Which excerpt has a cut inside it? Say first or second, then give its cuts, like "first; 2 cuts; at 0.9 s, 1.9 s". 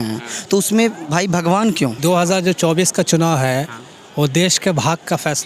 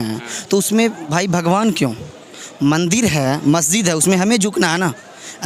first; 1 cut; at 2.0 s